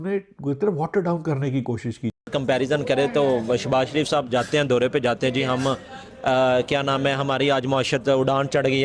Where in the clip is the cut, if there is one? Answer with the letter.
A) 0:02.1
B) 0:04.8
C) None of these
C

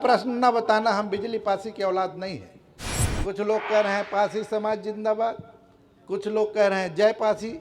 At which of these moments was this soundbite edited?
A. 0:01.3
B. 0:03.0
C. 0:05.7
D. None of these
B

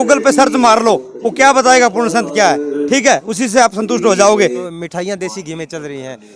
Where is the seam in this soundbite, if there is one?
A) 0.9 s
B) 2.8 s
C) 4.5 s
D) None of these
C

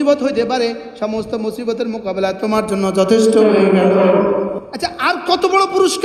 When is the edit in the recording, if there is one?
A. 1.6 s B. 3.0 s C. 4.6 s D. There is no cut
C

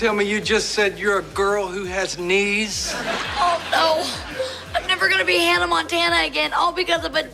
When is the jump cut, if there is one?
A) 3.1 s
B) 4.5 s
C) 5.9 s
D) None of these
A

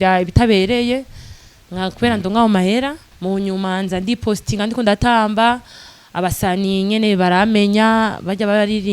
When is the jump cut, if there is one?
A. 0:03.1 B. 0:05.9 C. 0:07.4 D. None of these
A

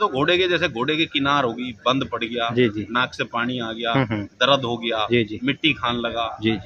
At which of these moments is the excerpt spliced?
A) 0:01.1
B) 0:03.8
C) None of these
C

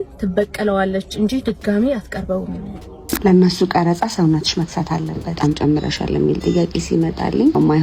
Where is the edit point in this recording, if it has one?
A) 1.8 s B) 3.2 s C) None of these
B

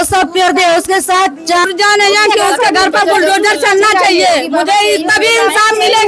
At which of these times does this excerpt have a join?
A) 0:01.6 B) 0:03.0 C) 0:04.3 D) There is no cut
A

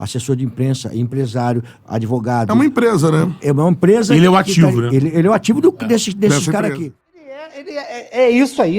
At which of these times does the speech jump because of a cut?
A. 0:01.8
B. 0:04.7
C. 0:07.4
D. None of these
C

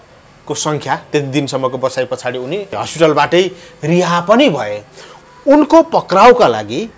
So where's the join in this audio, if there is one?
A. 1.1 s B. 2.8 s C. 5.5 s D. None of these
B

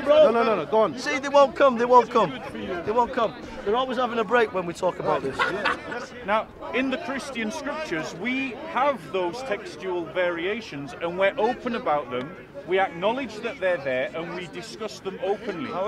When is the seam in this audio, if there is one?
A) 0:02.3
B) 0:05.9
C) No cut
B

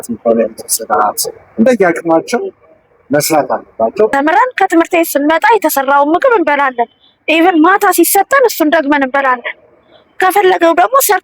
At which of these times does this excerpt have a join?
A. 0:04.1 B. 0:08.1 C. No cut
A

